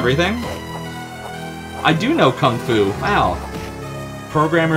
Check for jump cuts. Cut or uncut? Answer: cut